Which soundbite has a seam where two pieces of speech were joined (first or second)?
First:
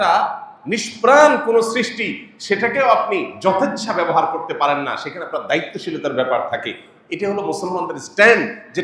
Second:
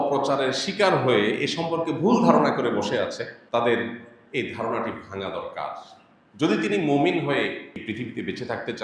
second